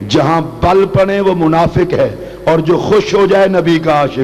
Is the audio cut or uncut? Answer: uncut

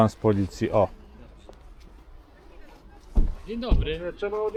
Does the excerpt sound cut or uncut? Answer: uncut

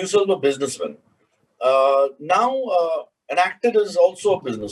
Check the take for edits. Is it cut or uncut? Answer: uncut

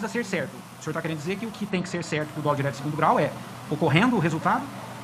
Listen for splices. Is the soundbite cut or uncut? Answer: uncut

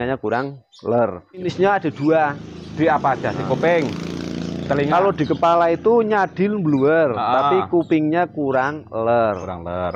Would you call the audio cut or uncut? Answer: cut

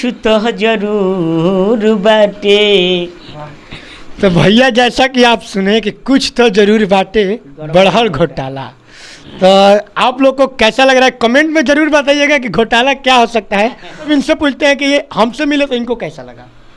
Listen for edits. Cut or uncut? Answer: uncut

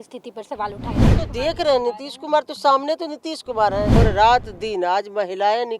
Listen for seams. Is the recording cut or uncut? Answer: cut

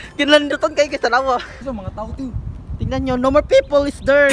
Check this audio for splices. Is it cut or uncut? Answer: cut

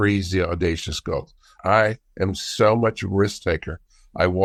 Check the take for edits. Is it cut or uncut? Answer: uncut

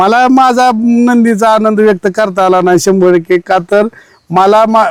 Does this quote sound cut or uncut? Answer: uncut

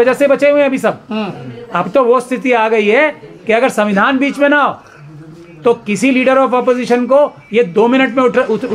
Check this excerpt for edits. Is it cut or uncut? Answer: uncut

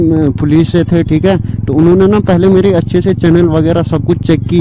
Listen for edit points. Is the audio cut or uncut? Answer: uncut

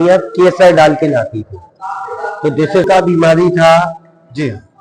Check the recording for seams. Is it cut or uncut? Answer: cut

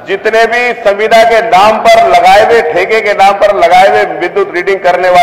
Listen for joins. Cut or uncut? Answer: uncut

